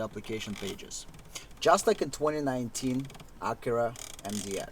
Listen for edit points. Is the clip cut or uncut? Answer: uncut